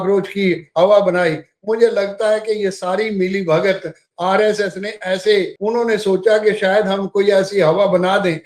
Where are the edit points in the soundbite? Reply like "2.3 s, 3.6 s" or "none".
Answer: 5.5 s